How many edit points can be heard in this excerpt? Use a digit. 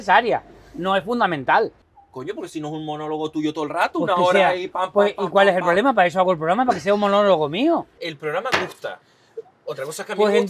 2